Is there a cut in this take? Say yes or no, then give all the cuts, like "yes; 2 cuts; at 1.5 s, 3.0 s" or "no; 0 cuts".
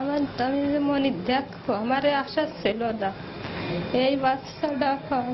no; 0 cuts